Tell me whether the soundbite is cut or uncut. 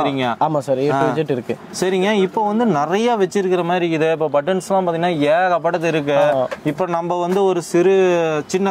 uncut